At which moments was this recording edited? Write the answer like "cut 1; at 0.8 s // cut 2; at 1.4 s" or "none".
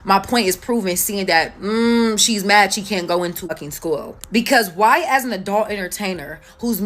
cut 1; at 3.5 s